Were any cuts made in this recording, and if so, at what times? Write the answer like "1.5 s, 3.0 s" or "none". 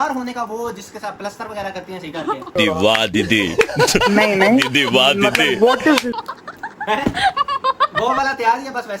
none